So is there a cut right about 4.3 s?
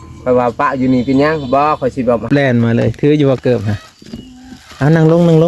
no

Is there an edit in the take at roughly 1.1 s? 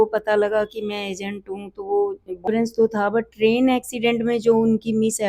no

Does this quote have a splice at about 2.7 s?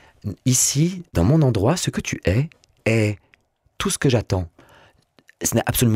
no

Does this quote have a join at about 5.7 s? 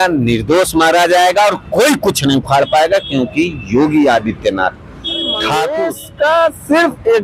yes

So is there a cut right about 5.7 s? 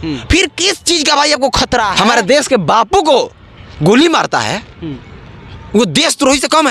no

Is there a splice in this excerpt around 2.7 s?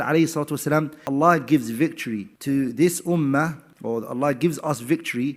no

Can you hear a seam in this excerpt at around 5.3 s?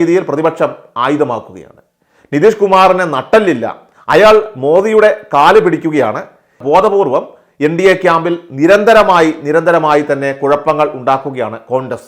no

